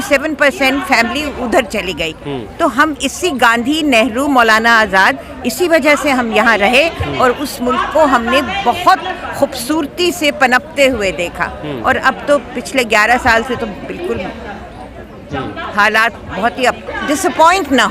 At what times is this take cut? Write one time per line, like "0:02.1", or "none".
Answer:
0:16.8